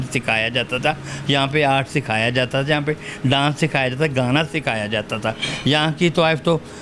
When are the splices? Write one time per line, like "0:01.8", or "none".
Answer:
none